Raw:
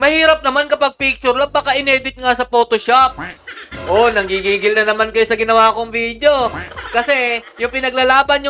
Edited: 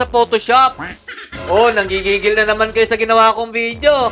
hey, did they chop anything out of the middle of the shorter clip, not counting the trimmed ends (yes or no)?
no